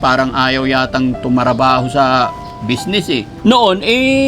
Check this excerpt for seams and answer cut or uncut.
cut